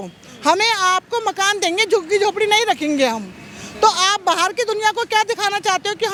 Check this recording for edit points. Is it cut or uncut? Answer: uncut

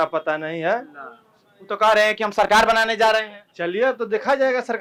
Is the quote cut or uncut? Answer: uncut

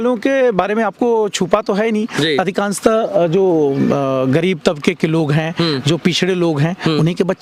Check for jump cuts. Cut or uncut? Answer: uncut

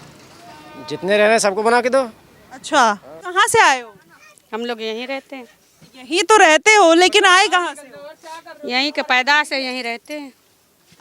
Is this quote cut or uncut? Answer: cut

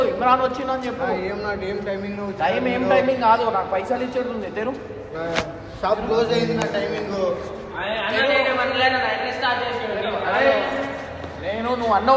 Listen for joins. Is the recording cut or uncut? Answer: uncut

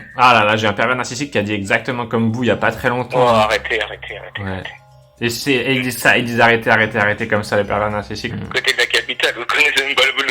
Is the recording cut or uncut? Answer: cut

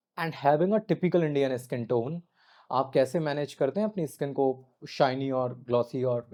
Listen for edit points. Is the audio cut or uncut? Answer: uncut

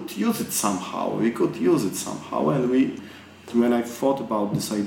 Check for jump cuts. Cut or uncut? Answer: cut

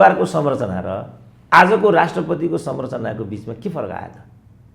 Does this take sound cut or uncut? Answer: uncut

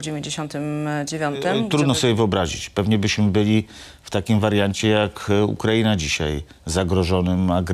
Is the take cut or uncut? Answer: cut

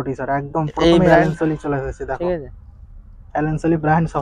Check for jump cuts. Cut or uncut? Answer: uncut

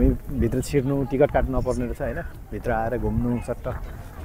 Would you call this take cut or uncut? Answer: uncut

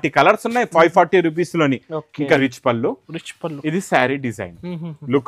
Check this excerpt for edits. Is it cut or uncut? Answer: cut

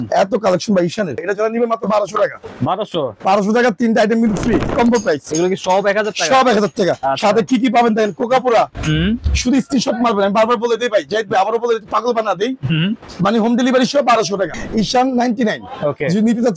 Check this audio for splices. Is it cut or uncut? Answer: cut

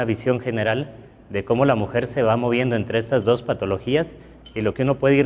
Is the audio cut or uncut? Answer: cut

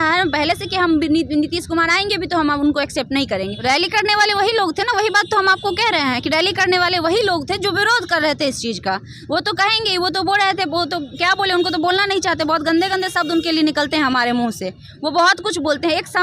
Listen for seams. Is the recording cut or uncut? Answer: cut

